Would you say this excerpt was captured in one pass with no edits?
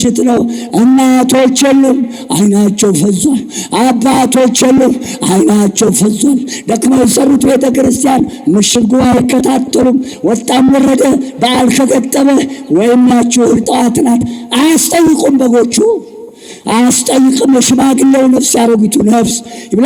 yes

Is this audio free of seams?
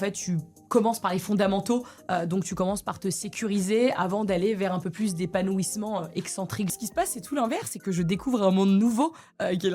no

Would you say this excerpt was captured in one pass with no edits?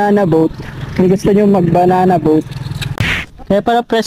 no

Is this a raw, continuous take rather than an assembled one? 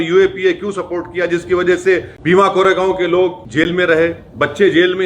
no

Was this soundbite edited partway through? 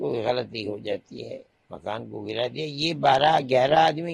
no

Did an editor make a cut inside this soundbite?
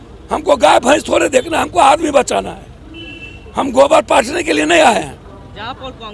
no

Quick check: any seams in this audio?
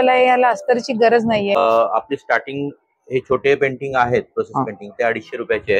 yes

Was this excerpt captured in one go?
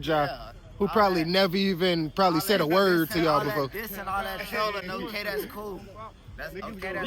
yes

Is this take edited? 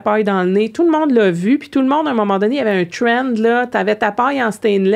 no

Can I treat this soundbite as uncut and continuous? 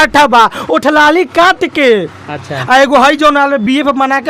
yes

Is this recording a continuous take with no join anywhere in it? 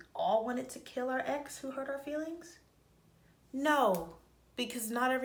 yes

